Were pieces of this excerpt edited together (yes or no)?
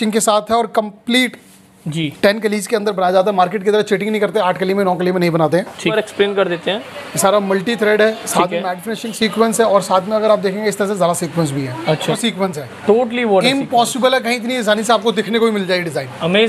yes